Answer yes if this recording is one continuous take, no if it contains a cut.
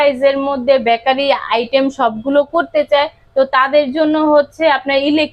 yes